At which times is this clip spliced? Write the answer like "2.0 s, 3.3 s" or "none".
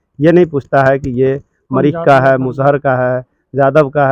none